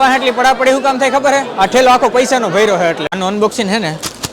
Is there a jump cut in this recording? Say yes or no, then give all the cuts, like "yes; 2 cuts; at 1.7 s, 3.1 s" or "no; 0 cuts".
yes; 1 cut; at 3.1 s